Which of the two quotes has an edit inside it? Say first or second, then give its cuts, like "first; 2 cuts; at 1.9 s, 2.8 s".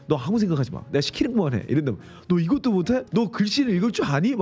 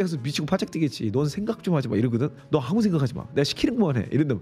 first; 1 cut; at 3.1 s